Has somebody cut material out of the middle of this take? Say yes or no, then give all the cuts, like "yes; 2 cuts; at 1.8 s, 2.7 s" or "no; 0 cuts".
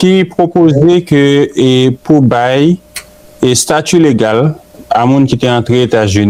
no; 0 cuts